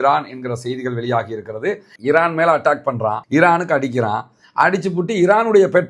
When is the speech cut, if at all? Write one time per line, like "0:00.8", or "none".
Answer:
0:02.0